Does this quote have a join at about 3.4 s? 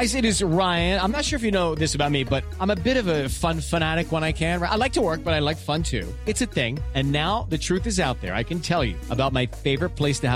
no; 0 cuts

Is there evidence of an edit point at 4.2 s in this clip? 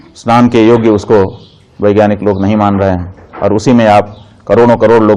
no; 0 cuts

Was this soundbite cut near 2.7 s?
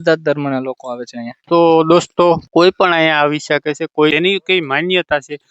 no; 1 cut; at 4.1 s

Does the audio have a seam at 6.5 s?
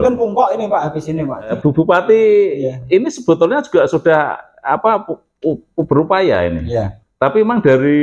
no; 1 cut; at 1.5 s

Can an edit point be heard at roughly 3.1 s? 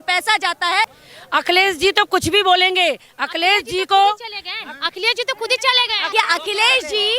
no; 2 cuts; at 1.0 s, 6.0 s

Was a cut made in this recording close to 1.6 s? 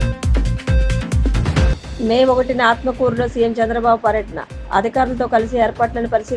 yes; 1 cut; at 1.6 s

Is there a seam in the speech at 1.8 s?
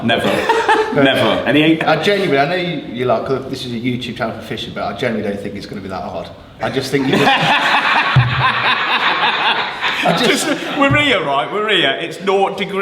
yes; 1 cut; at 1.8 s

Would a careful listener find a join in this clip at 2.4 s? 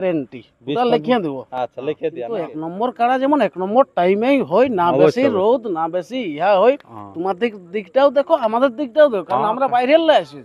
yes; 1 cut; at 2.4 s

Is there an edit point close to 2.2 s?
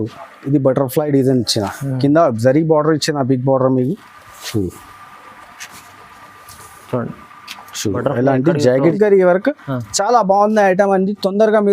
no; 1 cut; at 8.9 s

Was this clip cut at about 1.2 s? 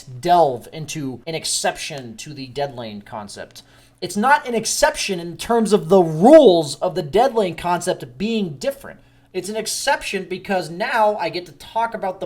yes; 1 cut; at 1.2 s

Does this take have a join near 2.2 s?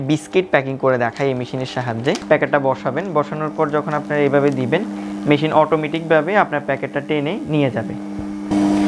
yes; 1 cut; at 2.2 s

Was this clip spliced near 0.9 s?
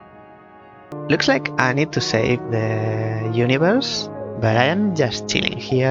yes; 1 cut; at 0.9 s

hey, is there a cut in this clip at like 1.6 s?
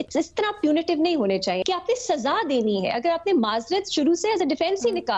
yes; 1 cut; at 1.6 s

